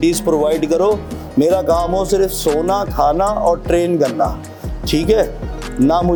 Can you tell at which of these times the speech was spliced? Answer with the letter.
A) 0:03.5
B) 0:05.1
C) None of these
C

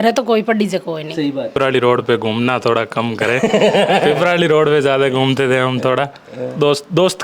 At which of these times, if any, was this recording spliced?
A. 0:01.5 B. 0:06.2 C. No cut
A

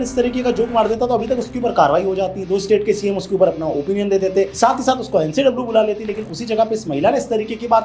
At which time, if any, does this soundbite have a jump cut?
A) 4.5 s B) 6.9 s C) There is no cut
A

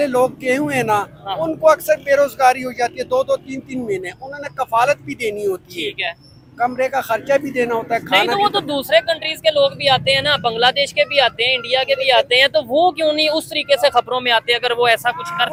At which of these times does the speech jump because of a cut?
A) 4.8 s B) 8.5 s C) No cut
C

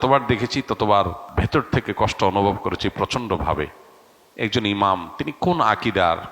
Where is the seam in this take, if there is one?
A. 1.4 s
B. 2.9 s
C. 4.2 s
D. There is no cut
A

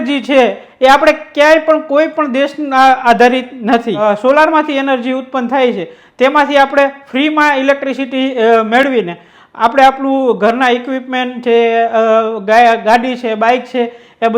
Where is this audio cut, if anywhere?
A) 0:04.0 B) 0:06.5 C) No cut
A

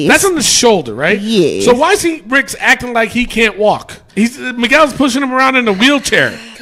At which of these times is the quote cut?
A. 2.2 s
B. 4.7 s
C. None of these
C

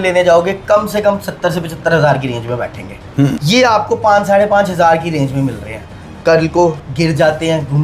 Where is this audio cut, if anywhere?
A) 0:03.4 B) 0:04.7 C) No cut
A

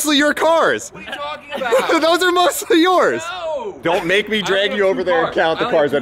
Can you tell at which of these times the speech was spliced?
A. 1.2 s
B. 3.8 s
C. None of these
B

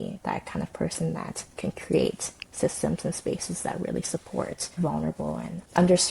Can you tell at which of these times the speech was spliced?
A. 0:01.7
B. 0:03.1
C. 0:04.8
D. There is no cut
C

